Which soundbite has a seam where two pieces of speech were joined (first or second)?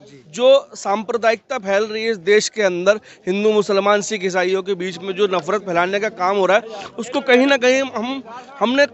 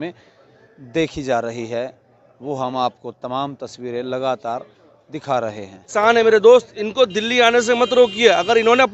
second